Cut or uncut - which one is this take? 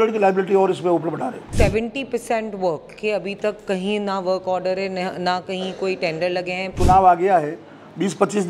cut